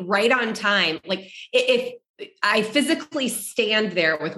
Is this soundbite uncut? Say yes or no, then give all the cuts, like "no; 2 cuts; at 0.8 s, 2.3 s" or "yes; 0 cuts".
yes; 0 cuts